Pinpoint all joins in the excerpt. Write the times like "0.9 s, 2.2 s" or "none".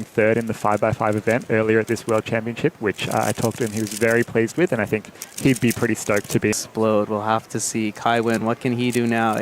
6.6 s